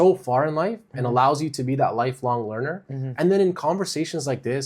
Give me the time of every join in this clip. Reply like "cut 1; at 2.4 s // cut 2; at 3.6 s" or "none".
none